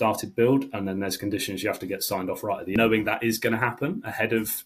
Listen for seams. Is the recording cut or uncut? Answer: cut